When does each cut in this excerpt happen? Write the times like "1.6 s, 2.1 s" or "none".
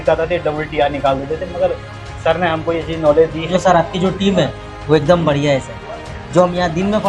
3.5 s

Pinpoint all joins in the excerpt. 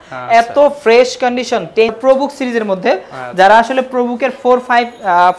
1.9 s

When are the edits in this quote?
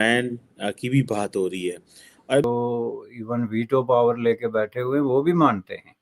2.4 s

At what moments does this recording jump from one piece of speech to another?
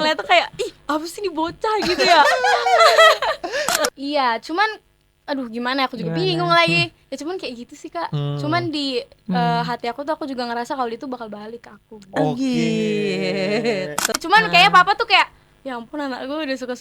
3.9 s, 14.1 s

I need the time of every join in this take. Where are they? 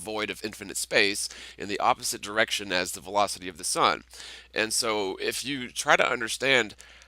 2.4 s

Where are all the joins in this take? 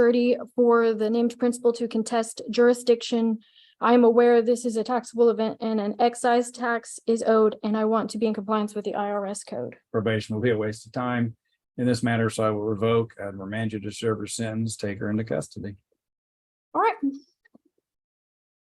9.8 s

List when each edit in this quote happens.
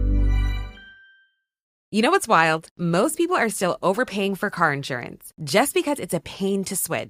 1.8 s

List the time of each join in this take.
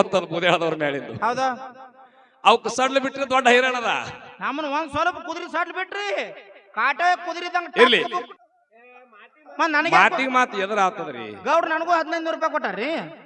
8.3 s

